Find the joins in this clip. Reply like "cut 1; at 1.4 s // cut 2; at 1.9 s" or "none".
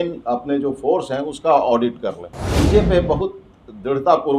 cut 1; at 2.6 s